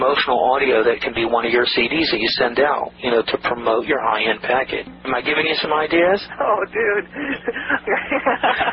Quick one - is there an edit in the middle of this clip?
yes; 2 cuts; at 4.9 s, 7.8 s

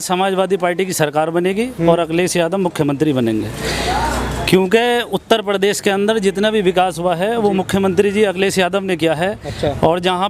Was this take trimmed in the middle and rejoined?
no; 0 cuts

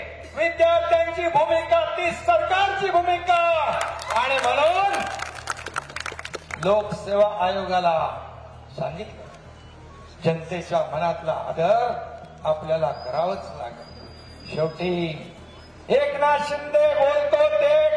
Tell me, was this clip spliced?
no; 0 cuts

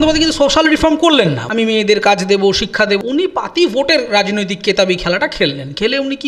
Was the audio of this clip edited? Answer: yes; 2 cuts; at 1.4 s, 3.0 s

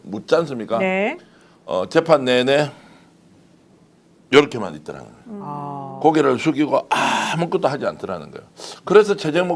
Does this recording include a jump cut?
no; 0 cuts

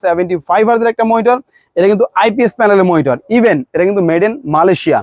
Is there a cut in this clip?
no; 0 cuts

